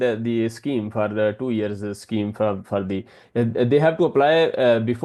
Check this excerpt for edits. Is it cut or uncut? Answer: uncut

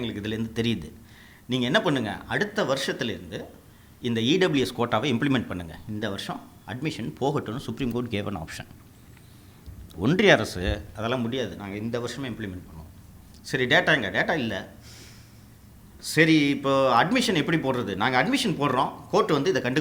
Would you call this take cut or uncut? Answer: uncut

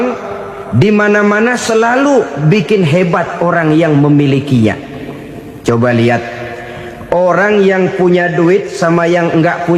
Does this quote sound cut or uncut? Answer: uncut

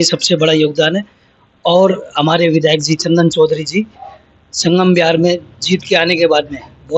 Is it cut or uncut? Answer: uncut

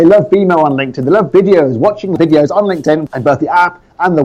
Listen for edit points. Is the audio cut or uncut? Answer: cut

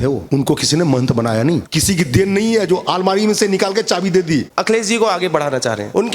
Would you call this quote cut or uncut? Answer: cut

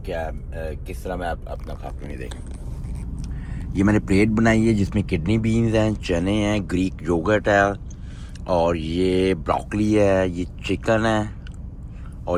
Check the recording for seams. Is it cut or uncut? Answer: uncut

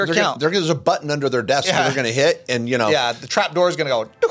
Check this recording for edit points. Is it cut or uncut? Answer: uncut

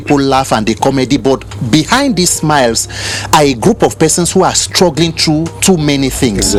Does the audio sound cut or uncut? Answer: uncut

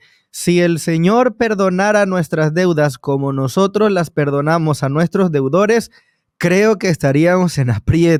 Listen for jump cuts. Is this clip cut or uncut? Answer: uncut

